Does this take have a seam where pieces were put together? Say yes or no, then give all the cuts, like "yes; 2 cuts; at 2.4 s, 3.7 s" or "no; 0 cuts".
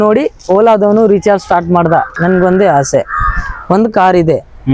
yes; 1 cut; at 2.1 s